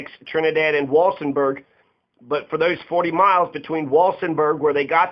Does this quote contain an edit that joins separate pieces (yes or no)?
no